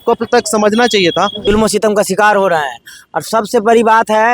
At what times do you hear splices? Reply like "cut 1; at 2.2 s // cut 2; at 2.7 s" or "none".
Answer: cut 1; at 1.4 s